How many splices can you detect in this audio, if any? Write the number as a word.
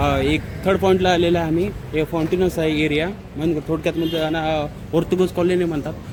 zero